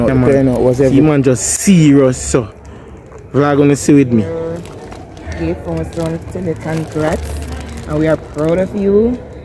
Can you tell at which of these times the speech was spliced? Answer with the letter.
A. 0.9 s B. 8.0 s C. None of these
A